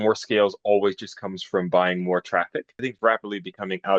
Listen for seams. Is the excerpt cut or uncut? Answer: cut